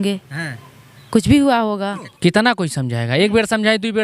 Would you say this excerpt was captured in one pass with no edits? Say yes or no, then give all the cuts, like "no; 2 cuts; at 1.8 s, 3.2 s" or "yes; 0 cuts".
no; 1 cut; at 2.0 s